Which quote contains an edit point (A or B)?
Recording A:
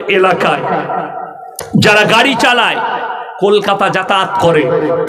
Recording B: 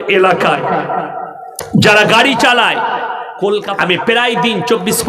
B